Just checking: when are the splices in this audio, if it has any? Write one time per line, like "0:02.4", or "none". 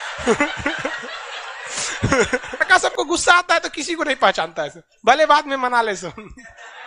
0:02.7